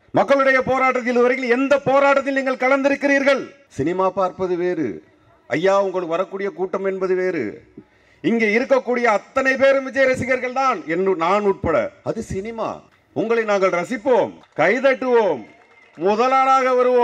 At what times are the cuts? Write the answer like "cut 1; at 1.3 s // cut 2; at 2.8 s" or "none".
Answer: cut 1; at 3.6 s // cut 2; at 12.9 s // cut 3; at 14.4 s